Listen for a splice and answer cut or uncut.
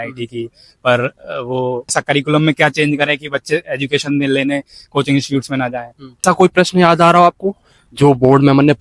cut